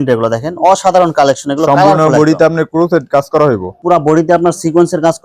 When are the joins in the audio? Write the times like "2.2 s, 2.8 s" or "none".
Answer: 3.8 s